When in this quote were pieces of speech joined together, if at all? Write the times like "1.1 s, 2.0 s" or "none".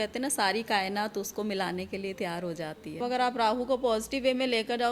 3.0 s